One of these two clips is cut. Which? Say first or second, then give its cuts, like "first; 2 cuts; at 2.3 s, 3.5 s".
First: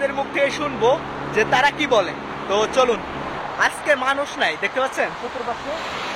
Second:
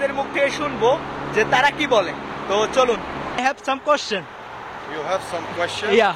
second; 1 cut; at 3.3 s